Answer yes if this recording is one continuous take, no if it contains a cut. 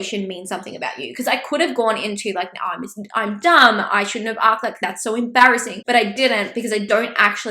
no